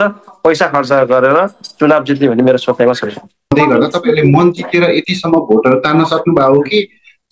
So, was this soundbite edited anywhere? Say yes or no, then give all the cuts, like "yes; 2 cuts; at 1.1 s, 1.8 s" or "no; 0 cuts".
yes; 1 cut; at 3.5 s